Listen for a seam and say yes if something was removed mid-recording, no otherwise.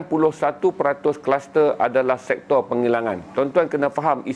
no